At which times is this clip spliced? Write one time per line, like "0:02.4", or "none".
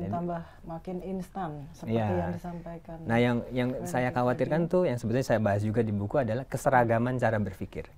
none